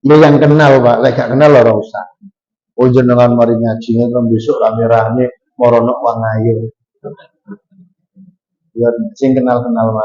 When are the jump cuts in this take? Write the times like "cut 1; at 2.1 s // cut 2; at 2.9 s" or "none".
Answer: none